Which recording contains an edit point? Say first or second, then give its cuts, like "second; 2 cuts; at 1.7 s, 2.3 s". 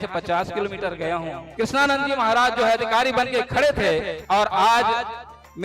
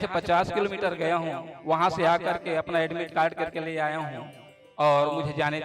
first; 2 cuts; at 1.4 s, 4.2 s